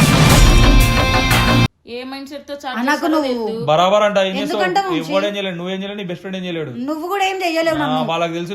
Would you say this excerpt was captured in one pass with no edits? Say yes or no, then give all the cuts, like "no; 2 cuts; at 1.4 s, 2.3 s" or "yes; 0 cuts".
no; 1 cut; at 1.8 s